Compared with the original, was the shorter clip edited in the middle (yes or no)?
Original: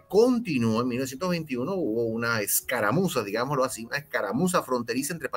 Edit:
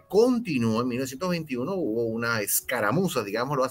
no